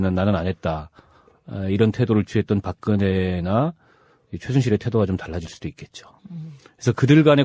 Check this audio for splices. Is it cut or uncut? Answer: cut